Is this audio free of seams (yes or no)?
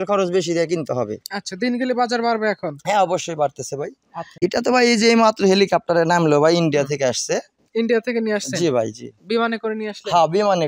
no